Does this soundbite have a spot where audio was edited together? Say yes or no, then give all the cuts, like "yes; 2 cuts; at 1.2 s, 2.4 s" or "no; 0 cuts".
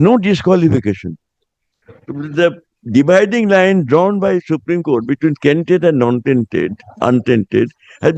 no; 0 cuts